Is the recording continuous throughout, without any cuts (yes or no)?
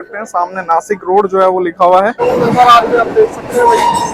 no